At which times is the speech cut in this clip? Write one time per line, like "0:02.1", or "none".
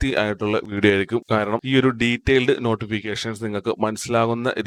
none